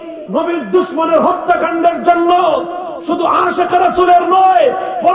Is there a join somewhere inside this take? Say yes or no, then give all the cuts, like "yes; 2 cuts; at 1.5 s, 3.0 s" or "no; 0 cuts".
no; 0 cuts